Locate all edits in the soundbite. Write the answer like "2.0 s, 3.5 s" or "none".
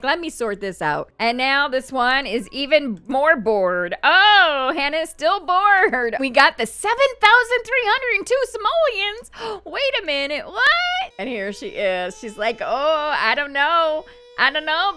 1.1 s, 6.2 s, 11.1 s